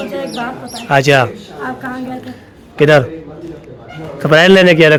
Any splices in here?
no; 0 cuts

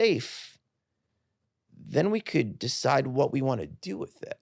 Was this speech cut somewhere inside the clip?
no; 0 cuts

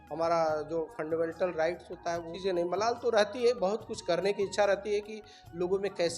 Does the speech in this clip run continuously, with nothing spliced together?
no; 1 cut; at 2.3 s

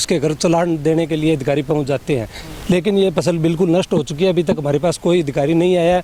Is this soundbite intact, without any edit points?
yes; 0 cuts

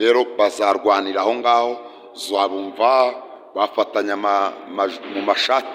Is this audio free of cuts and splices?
yes; 0 cuts

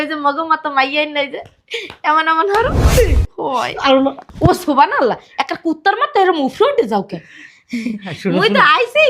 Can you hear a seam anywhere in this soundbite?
yes; 1 cut; at 2.9 s

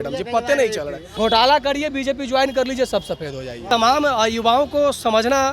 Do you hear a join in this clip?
yes; 2 cuts; at 1.0 s, 3.6 s

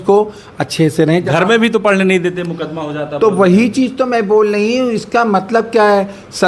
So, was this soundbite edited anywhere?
no; 0 cuts

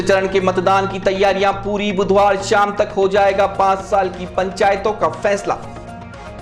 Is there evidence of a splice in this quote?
no; 0 cuts

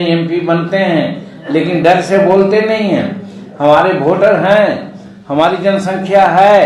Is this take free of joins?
yes; 0 cuts

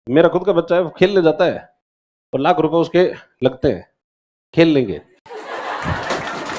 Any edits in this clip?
no; 0 cuts

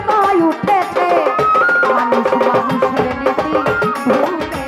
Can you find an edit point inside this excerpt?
no; 0 cuts

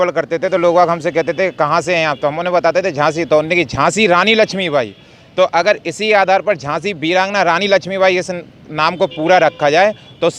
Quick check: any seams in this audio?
no; 0 cuts

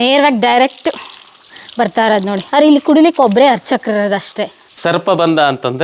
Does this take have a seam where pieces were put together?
yes; 1 cut; at 4.7 s

